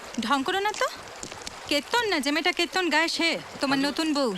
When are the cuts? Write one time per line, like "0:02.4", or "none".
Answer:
0:03.5